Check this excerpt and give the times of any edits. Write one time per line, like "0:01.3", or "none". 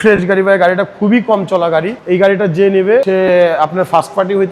0:02.0
0:03.0